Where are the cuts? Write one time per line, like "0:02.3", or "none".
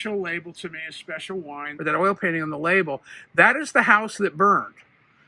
0:01.7